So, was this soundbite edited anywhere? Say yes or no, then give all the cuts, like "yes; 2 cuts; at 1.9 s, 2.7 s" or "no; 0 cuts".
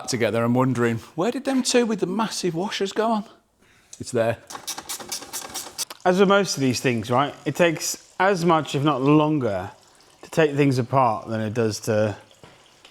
no; 0 cuts